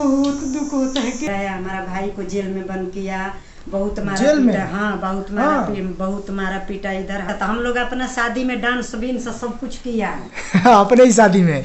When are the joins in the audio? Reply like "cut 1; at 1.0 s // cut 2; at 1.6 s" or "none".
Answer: cut 1; at 1.2 s // cut 2; at 7.3 s

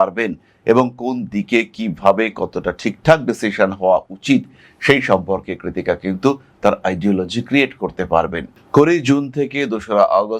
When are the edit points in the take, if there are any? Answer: cut 1; at 8.5 s

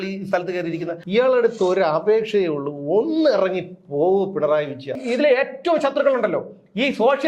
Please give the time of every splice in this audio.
cut 1; at 1.0 s // cut 2; at 5.0 s

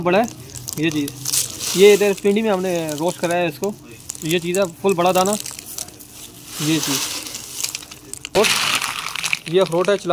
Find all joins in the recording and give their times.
cut 1; at 8.4 s

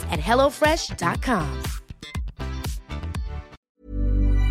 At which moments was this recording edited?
cut 1; at 3.6 s

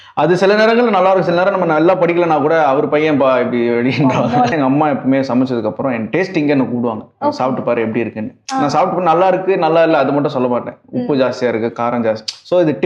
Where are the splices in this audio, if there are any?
cut 1; at 4.5 s

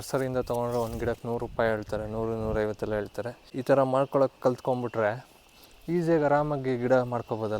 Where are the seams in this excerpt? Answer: cut 1; at 3.4 s

